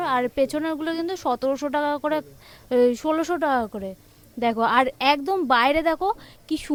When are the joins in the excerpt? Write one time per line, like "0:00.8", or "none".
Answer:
none

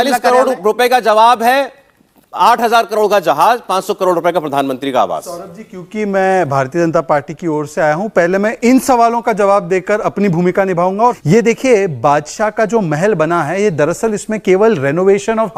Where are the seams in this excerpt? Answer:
none

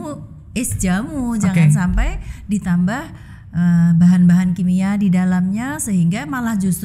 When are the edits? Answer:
none

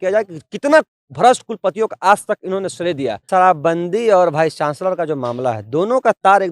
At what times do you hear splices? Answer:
0:03.2

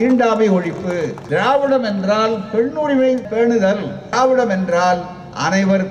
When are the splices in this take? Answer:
0:01.2
0:03.5

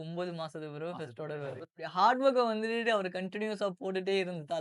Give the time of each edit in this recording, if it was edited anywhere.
0:01.9

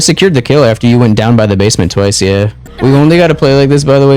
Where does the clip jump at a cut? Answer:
0:02.6

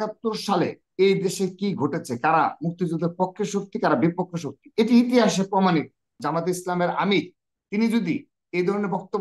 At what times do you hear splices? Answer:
0:06.2

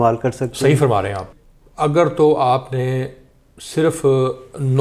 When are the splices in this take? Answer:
0:01.2

